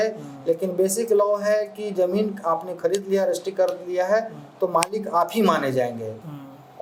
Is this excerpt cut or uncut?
uncut